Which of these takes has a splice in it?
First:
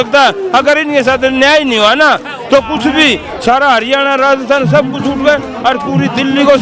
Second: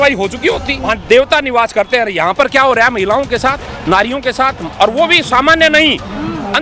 second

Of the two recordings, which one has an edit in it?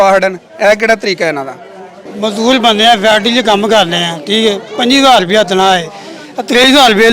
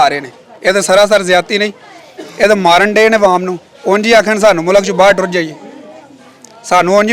first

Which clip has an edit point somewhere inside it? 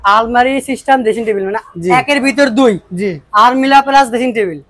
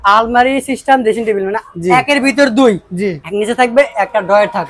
second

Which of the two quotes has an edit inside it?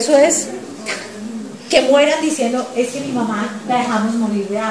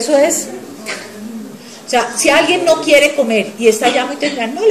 second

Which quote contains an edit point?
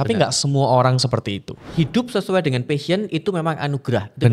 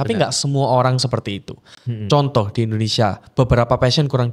first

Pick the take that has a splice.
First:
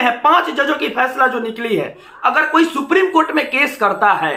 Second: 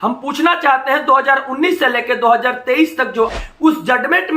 second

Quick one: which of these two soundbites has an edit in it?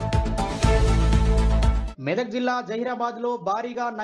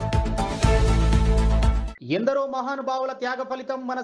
first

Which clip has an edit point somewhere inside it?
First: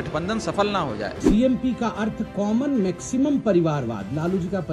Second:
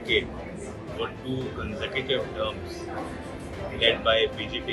first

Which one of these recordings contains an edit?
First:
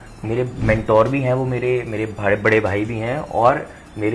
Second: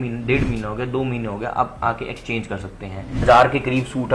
second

